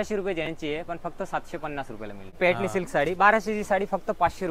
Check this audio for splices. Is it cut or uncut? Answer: cut